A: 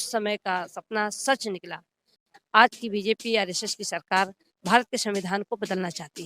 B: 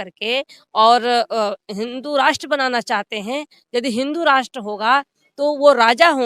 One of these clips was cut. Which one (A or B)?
A